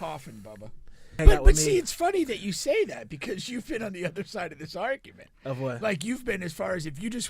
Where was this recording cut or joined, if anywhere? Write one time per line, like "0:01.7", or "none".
0:01.2